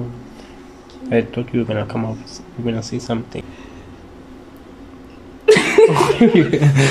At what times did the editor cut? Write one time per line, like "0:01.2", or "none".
0:03.4

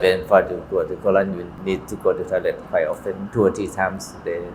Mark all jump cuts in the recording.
0:01.5
0:03.2

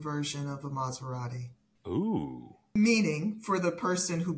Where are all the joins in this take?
0:02.7

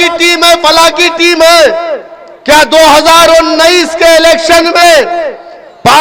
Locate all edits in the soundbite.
none

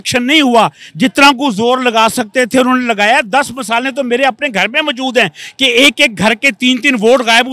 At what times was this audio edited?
none

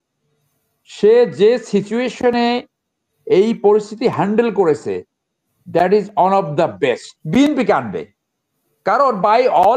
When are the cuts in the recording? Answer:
0:07.1

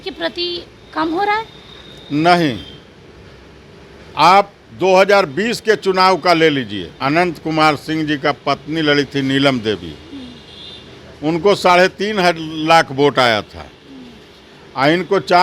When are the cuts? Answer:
0:06.8

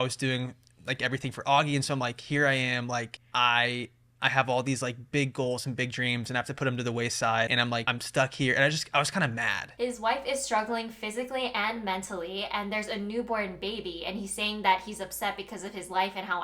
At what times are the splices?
0:09.7

